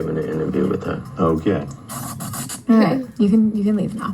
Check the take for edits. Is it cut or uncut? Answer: cut